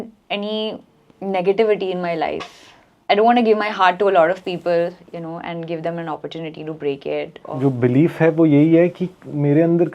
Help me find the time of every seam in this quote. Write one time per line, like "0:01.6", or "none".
0:02.9
0:07.4